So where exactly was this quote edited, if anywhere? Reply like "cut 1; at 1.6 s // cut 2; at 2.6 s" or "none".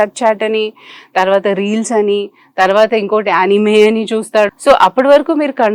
cut 1; at 4.5 s